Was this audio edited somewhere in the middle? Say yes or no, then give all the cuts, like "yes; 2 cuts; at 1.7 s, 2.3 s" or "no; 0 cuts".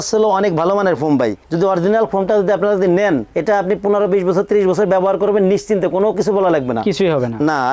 no; 0 cuts